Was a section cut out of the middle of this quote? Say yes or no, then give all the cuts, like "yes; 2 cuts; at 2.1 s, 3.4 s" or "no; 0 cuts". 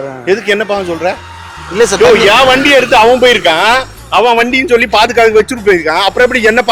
no; 0 cuts